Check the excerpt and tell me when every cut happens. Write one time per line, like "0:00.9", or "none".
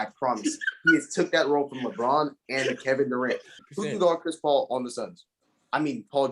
0:03.5